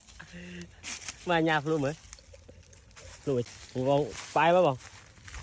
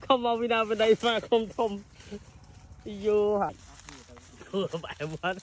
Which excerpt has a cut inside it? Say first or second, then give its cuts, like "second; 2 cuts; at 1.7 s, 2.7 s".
second; 1 cut; at 3.5 s